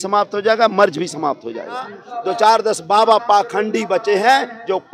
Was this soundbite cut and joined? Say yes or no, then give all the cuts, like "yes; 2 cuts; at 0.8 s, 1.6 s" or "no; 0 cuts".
yes; 1 cut; at 2.0 s